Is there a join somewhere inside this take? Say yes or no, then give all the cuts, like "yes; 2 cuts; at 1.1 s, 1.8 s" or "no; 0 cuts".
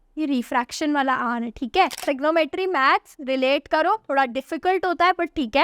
yes; 1 cut; at 2.0 s